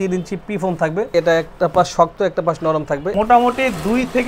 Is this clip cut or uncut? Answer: cut